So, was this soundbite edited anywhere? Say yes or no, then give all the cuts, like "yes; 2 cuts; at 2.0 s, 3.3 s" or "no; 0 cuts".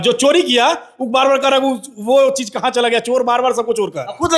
no; 0 cuts